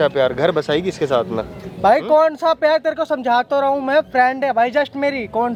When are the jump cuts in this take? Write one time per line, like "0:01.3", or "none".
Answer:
none